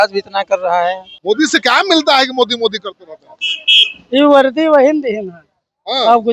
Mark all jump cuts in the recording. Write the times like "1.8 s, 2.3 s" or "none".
1.1 s